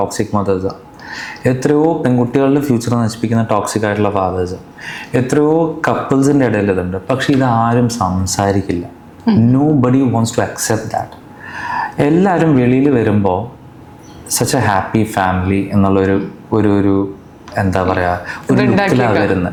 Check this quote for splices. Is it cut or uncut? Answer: uncut